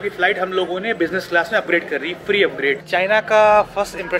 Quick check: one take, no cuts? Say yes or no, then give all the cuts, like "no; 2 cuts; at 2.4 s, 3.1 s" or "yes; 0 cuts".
no; 1 cut; at 2.8 s